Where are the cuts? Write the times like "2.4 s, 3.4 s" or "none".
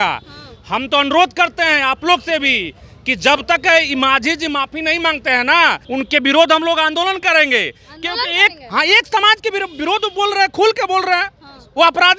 5.8 s